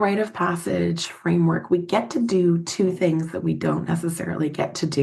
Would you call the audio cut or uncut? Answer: uncut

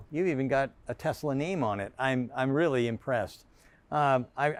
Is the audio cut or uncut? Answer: uncut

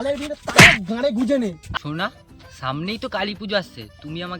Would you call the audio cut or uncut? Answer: cut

